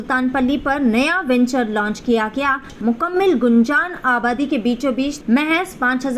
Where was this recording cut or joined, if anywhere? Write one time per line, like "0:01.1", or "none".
0:02.7
0:05.2